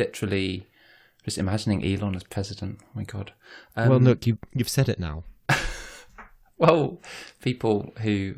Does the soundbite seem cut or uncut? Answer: uncut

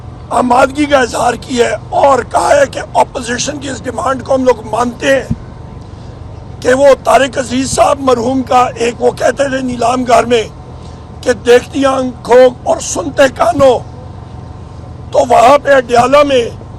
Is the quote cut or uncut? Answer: uncut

